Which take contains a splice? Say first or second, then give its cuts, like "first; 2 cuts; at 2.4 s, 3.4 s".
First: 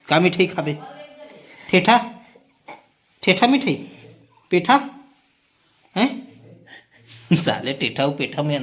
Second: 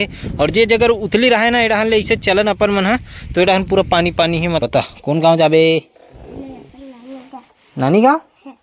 second; 1 cut; at 4.6 s